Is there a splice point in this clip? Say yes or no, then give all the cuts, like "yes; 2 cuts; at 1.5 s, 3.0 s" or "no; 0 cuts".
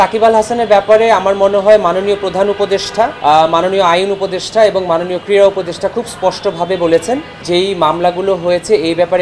yes; 2 cuts; at 3.1 s, 7.4 s